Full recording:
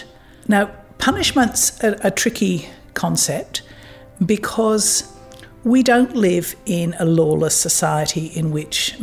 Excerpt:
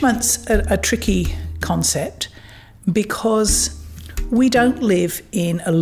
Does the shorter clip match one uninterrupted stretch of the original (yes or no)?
yes